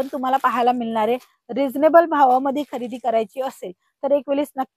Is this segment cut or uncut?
uncut